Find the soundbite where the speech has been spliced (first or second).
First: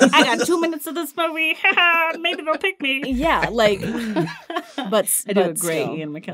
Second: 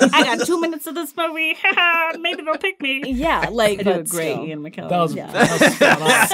second